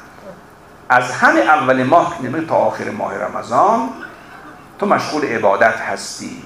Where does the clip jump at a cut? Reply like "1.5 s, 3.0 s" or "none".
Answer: none